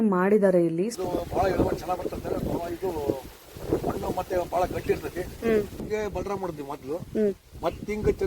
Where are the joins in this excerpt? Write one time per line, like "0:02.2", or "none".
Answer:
0:00.9
0:05.8